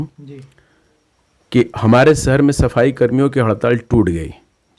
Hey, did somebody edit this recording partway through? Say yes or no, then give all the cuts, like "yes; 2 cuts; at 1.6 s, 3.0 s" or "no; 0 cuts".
no; 0 cuts